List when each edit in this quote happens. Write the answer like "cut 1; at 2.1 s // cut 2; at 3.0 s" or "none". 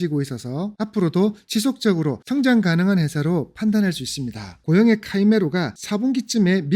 cut 1; at 4.6 s